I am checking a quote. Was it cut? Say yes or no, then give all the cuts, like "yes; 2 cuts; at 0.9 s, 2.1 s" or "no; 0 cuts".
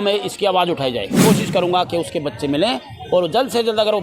yes; 1 cut; at 1.2 s